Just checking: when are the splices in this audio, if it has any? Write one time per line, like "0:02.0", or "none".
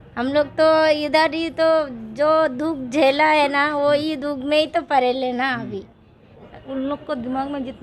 0:06.5